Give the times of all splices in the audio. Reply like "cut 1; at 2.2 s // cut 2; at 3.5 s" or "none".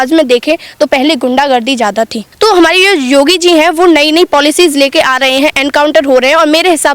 cut 1; at 2.2 s